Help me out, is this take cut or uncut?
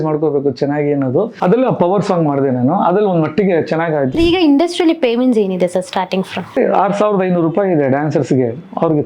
cut